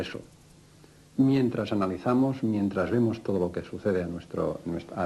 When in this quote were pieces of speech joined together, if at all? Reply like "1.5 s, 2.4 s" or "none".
none